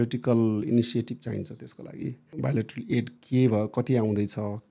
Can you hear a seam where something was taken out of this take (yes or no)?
yes